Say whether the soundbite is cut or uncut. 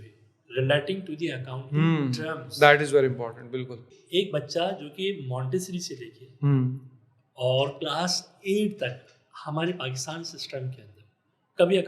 cut